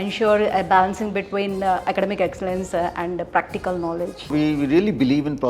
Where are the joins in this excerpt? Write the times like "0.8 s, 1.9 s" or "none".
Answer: 4.3 s